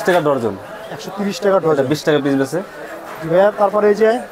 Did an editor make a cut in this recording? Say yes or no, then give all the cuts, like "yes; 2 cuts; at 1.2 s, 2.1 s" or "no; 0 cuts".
no; 0 cuts